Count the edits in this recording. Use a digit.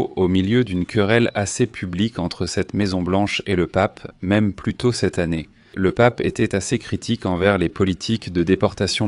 1